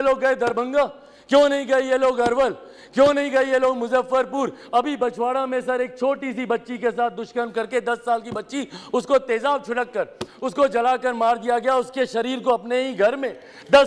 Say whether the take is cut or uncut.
uncut